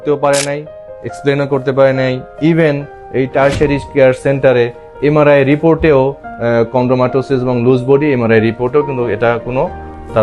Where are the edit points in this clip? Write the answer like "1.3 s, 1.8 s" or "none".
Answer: 6.3 s

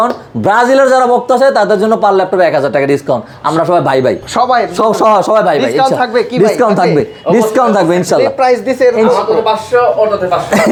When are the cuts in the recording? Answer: none

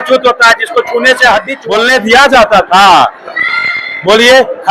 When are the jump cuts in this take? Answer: 1.5 s

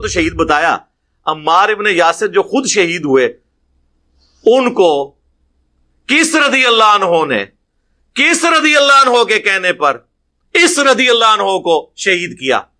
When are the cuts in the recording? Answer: none

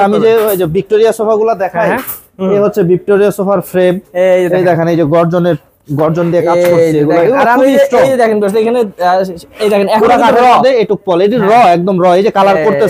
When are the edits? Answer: none

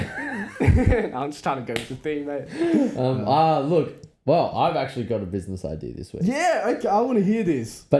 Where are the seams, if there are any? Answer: none

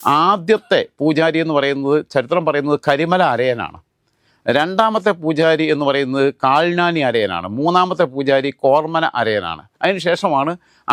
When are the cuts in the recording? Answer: none

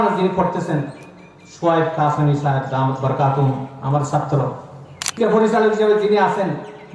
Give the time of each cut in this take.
5.2 s

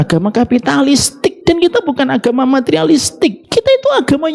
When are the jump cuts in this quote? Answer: 1.4 s, 3.4 s

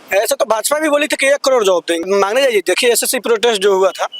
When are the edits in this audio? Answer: 2.1 s

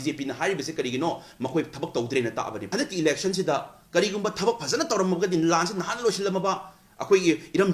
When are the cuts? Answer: 2.6 s

